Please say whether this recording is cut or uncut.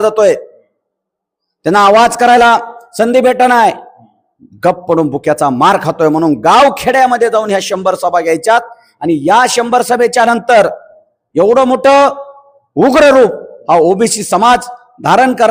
uncut